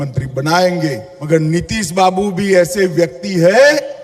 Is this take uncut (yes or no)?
no